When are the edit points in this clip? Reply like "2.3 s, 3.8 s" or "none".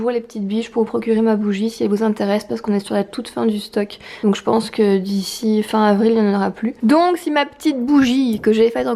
none